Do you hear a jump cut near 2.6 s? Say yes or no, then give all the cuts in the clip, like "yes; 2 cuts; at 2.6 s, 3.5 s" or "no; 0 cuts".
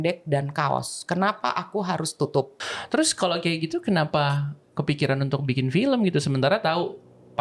yes; 1 cut; at 2.6 s